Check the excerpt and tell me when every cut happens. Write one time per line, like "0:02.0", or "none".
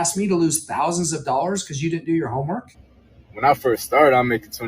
0:02.7